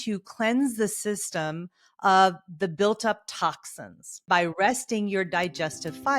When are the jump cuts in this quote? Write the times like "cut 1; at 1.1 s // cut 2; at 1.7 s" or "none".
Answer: cut 1; at 4.2 s